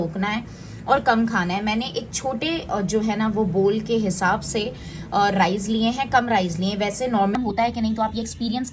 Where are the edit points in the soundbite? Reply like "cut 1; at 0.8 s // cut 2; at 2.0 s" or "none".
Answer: cut 1; at 7.4 s